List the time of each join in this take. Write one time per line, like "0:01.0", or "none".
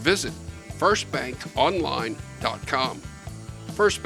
none